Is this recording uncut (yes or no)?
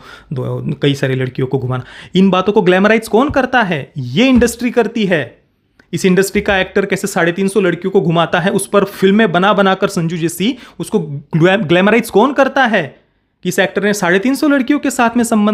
yes